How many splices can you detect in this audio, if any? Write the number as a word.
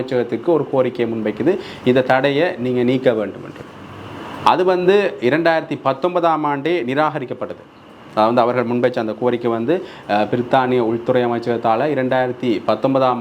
zero